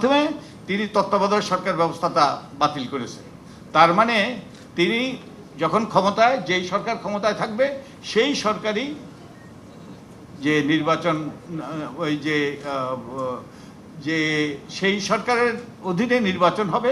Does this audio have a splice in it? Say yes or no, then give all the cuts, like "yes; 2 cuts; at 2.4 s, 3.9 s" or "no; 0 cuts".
no; 0 cuts